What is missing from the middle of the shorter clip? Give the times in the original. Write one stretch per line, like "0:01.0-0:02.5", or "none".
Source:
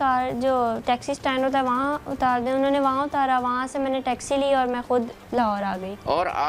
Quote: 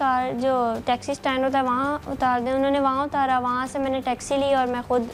none